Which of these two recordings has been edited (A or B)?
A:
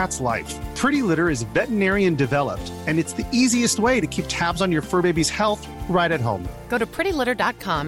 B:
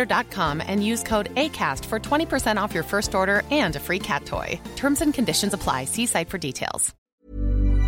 B